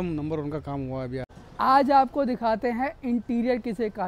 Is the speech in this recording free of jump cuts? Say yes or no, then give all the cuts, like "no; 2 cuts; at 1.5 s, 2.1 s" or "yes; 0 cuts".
no; 1 cut; at 1.6 s